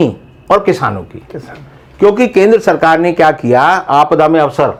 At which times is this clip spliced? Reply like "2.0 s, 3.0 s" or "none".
none